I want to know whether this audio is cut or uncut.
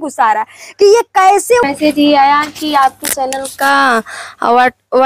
cut